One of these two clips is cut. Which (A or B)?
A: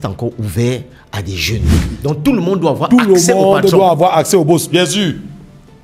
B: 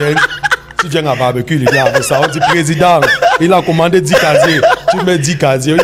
A